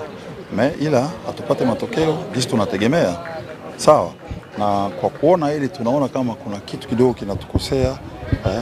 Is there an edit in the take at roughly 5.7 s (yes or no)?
no